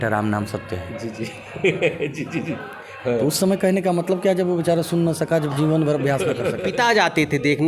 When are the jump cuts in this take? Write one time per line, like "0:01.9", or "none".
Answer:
0:06.6